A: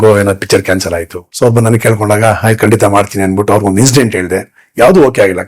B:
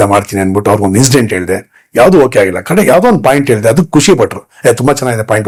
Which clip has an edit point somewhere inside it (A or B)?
A